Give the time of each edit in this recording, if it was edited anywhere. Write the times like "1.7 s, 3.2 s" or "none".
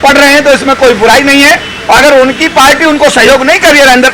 none